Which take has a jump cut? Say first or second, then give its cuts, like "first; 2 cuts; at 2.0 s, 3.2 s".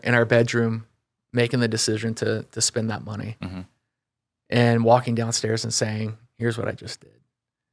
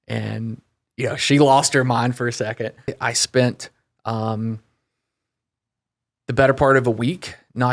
second; 1 cut; at 3.0 s